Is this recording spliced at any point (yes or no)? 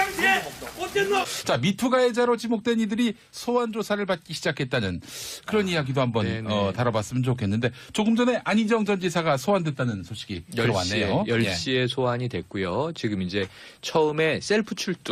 no